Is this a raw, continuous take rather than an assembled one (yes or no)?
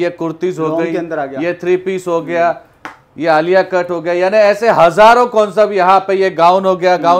yes